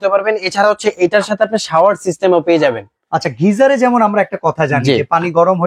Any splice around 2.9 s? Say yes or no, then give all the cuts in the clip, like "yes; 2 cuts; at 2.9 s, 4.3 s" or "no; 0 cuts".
no; 0 cuts